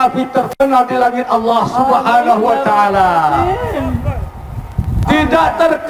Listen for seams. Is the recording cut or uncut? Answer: uncut